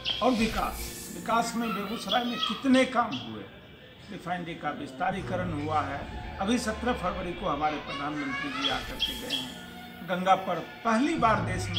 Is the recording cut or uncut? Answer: uncut